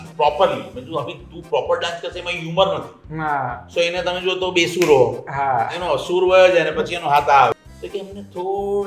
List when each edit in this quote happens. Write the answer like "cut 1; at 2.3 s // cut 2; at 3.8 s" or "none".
cut 1; at 7.5 s